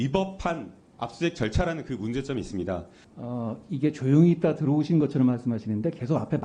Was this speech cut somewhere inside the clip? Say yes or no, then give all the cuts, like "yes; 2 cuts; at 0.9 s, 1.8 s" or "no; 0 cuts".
yes; 1 cut; at 3.0 s